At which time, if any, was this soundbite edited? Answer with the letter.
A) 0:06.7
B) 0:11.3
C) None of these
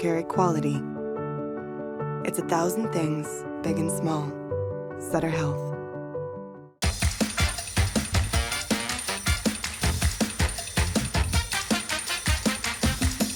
C